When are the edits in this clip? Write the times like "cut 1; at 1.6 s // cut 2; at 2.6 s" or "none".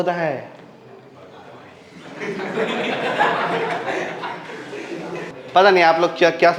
cut 1; at 5.3 s